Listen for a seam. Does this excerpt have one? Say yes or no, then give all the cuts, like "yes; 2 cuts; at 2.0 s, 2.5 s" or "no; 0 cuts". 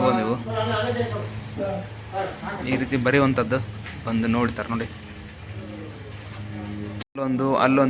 yes; 1 cut; at 6.9 s